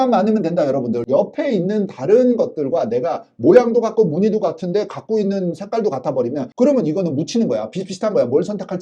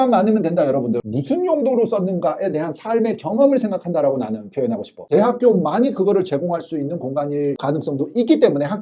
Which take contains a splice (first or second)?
second